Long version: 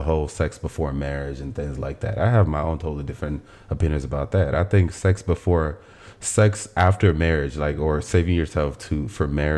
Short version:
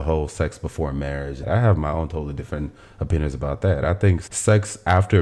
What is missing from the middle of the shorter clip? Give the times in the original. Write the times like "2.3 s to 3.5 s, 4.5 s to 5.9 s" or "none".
1.4 s to 2.1 s, 4.9 s to 6.1 s